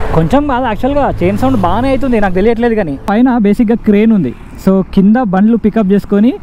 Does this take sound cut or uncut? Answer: cut